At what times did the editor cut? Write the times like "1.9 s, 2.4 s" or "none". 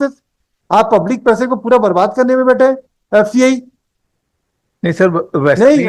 none

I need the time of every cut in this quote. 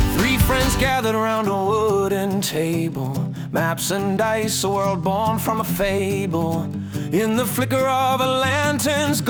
none

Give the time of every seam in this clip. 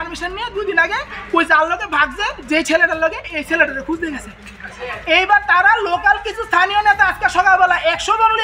none

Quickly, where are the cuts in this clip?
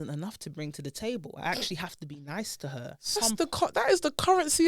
3.2 s

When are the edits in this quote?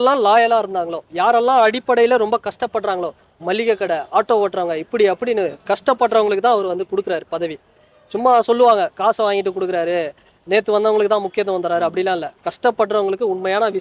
none

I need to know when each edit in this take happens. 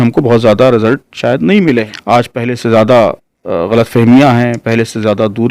1.9 s

